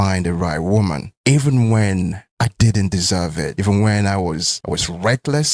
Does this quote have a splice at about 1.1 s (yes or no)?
yes